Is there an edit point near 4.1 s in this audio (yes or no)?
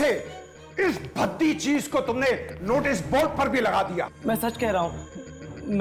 yes